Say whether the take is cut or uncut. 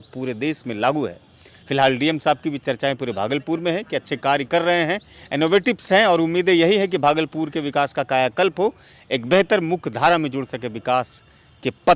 uncut